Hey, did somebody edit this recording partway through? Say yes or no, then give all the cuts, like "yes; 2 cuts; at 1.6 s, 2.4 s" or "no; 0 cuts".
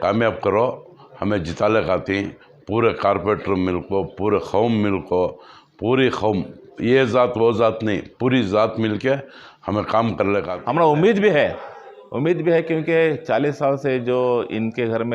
yes; 1 cut; at 10.5 s